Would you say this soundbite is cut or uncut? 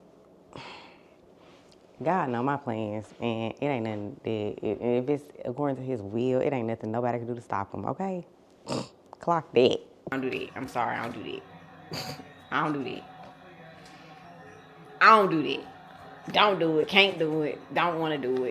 cut